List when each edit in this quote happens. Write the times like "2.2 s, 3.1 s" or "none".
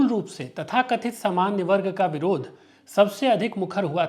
none